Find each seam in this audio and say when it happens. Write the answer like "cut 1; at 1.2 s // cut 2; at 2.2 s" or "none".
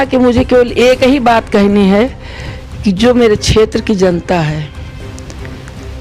none